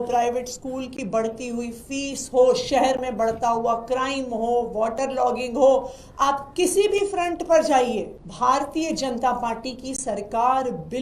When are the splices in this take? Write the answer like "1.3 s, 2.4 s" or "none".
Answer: 8.2 s